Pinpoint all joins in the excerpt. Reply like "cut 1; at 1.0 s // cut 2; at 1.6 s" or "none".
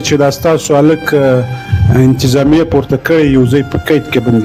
none